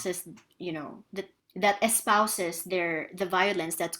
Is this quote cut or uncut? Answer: cut